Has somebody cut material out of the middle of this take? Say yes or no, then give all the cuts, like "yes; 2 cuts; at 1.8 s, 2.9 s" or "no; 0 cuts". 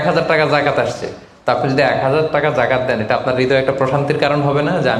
no; 0 cuts